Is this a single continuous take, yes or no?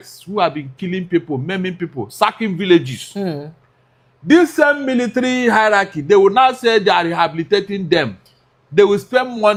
yes